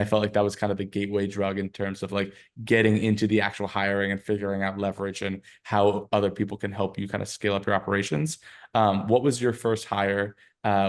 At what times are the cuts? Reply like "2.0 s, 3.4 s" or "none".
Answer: none